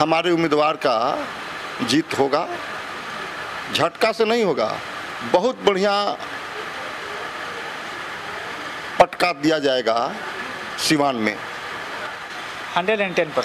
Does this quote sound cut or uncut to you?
cut